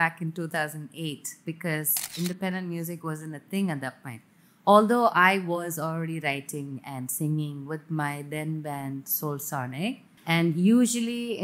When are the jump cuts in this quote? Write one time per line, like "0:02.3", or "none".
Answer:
0:10.1